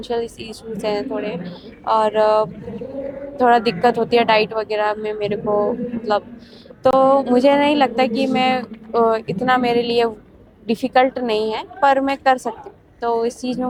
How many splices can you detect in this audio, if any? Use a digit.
0